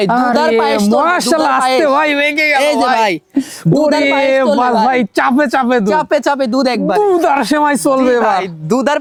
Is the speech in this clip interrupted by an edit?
no; 0 cuts

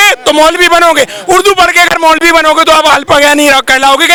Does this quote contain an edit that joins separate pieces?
no; 0 cuts

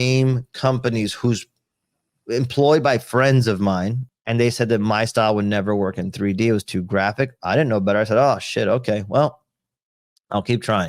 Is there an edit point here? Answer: yes; 1 cut; at 4.0 s

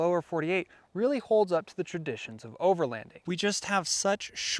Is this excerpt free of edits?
no; 1 cut; at 3.1 s

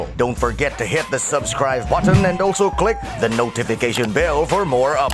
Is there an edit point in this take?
no; 0 cuts

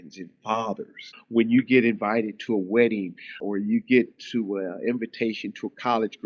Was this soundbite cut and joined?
yes; 2 cuts; at 1.1 s, 3.3 s

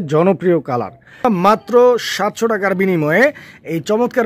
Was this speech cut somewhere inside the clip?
yes; 1 cut; at 1.2 s

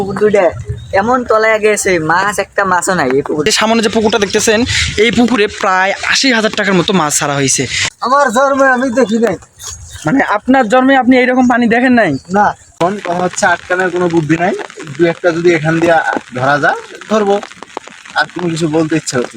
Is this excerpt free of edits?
no; 3 cuts; at 3.5 s, 7.9 s, 12.6 s

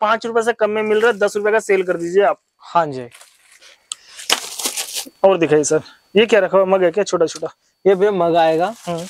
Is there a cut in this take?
no; 0 cuts

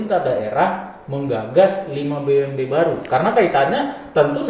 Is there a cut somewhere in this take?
no; 0 cuts

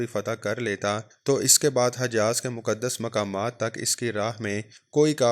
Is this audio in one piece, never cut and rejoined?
yes; 0 cuts

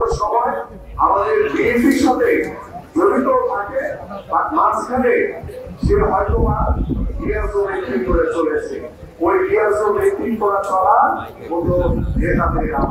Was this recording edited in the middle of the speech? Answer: no; 0 cuts

